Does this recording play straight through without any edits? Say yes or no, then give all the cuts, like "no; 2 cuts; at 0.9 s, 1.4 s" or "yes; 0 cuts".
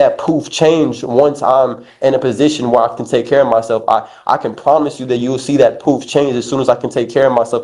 yes; 0 cuts